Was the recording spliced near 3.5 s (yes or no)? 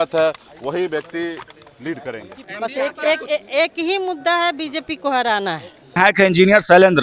no